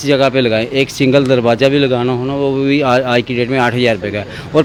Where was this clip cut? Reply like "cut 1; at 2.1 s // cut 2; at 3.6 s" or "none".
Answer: none